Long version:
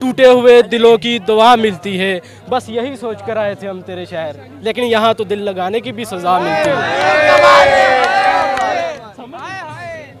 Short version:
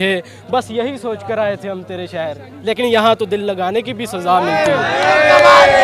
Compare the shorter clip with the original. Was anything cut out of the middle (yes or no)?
no